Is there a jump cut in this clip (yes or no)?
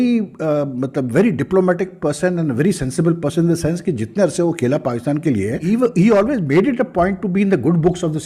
yes